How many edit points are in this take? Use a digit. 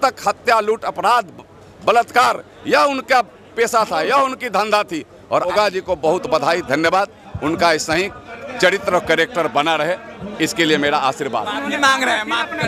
1